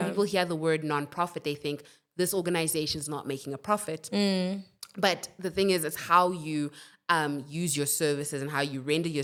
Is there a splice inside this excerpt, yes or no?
no